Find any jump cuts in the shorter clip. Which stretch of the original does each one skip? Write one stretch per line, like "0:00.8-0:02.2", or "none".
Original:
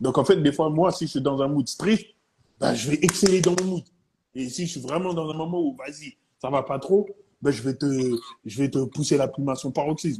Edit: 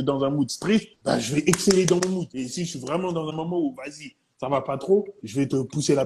0:02.1-0:02.5
0:03.9-0:04.3
0:07.2-0:08.4